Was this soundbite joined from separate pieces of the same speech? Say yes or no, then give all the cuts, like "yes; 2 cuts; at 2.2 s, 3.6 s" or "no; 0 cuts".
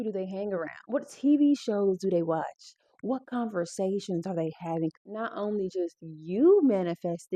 yes; 1 cut; at 5.0 s